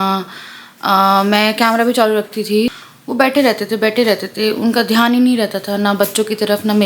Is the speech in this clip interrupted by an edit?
yes; 1 cut; at 2.7 s

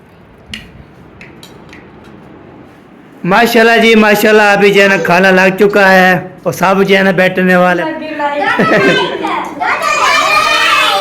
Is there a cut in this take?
yes; 2 cuts; at 2.8 s, 7.8 s

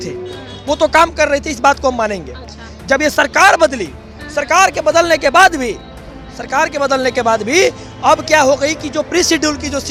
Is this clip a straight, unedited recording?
yes; 0 cuts

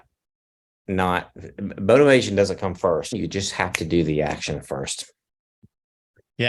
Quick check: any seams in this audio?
yes; 1 cut; at 3.1 s

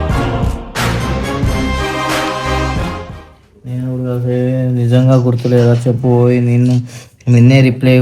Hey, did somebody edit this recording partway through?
yes; 1 cut; at 3.1 s

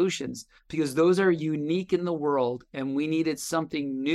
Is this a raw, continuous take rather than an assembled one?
yes; 0 cuts

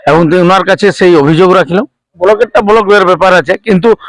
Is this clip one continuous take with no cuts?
no; 1 cut; at 2.1 s

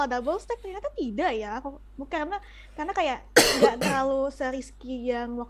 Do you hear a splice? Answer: no; 0 cuts

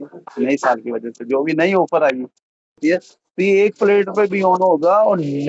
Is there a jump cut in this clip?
yes; 1 cut; at 2.8 s

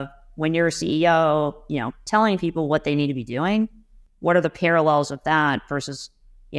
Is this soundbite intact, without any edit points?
yes; 0 cuts

